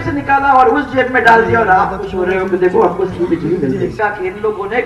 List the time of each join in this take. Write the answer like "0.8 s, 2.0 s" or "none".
4.0 s

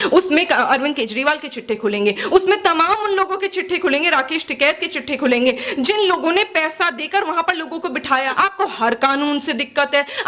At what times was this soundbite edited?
8.3 s

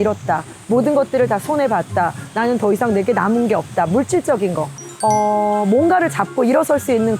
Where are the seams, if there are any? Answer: 4.8 s

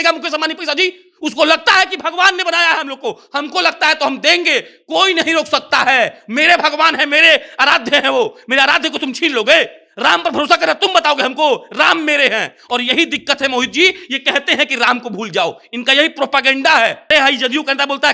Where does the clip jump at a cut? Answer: 17.1 s

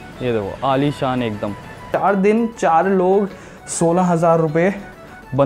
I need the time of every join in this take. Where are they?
1.8 s

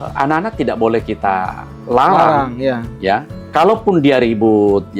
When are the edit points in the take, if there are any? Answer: 3.4 s

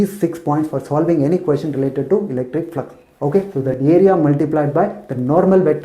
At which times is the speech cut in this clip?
3.6 s

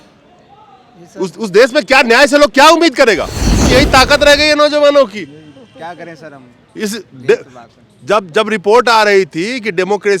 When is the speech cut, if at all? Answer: 3.7 s

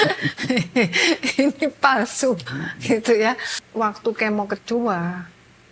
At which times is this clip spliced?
3.5 s

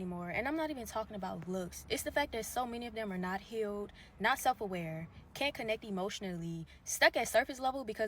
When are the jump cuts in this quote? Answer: 5.5 s

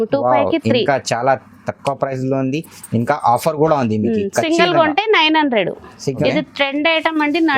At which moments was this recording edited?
6.2 s

